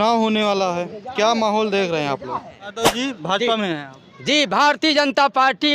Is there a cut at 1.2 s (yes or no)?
no